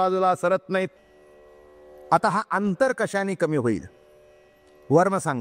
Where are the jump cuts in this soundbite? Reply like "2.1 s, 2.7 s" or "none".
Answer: 0.9 s